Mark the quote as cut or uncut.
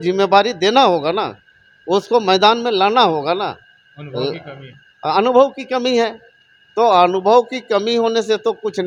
uncut